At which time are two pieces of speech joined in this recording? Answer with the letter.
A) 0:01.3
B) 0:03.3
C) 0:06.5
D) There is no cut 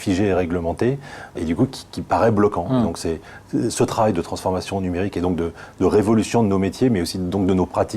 A